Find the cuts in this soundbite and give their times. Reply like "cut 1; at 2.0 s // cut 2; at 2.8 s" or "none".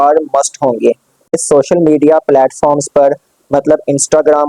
cut 1; at 1.4 s